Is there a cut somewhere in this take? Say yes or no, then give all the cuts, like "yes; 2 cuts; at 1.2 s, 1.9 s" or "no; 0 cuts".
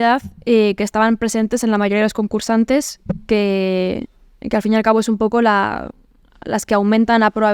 no; 0 cuts